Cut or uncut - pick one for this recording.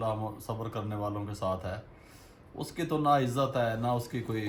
uncut